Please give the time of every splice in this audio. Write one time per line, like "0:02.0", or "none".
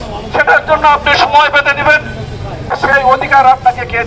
0:02.8